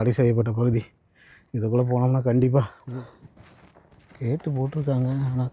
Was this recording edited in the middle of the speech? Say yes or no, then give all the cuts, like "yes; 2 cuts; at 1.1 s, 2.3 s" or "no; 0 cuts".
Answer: yes; 1 cut; at 2.8 s